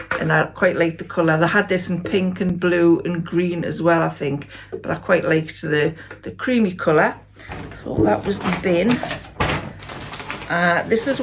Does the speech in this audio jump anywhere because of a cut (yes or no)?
no